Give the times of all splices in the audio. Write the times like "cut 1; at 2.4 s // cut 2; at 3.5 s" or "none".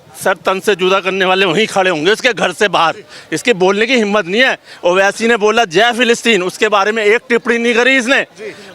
none